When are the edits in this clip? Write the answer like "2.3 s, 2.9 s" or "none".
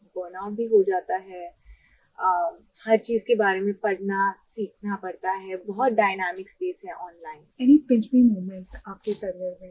7.4 s